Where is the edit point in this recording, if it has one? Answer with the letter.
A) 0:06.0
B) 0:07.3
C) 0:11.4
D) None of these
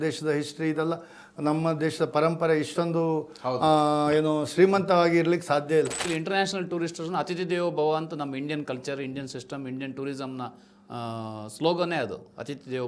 A